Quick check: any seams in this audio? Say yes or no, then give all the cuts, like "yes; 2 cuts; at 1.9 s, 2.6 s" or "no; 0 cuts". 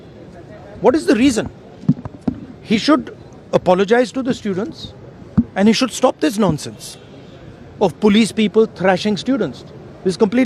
no; 0 cuts